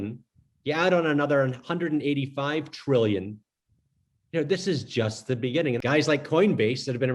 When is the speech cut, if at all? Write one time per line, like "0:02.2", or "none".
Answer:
0:05.8

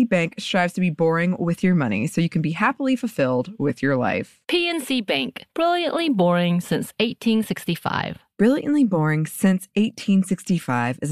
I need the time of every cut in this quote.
none

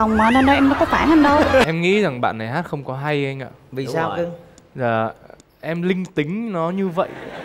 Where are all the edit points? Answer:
0:01.6

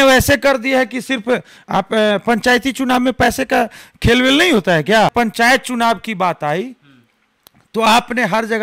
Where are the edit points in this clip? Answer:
0:05.1

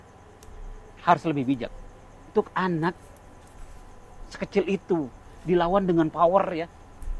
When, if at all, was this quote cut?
0:02.3

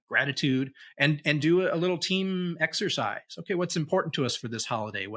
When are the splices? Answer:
none

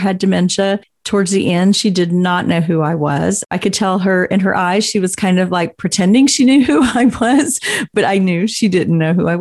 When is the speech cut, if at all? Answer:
0:00.9
0:03.5
0:07.9

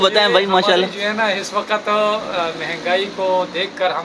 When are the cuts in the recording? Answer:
none

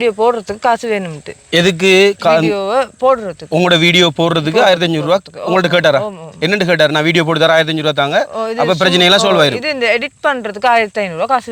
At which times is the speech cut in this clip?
none

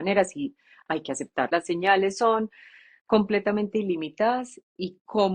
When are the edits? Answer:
0:01.5

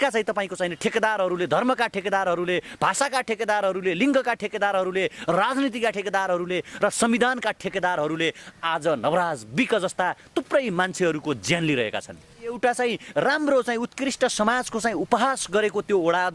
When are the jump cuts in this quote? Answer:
0:12.6

